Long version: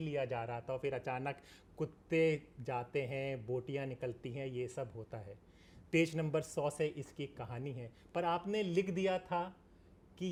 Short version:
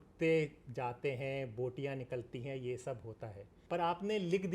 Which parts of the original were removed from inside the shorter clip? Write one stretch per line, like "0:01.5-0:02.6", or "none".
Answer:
0:05.4-0:07.9